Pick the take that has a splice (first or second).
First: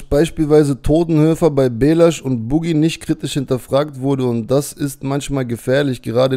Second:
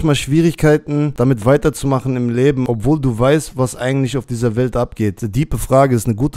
second